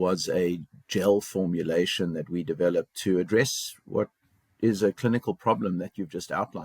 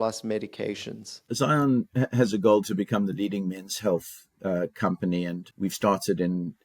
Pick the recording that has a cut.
second; 2 cuts; at 1.2 s, 5.4 s

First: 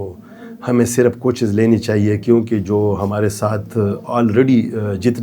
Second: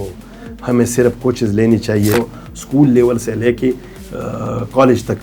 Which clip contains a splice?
second; 1 cut; at 2.1 s

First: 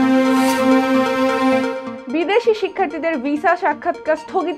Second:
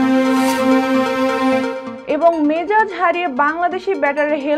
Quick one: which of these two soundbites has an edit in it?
first; 1 cut; at 1.9 s

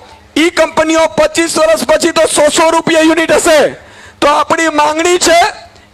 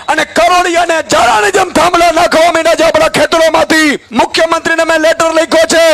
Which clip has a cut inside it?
second; 1 cut; at 4.0 s

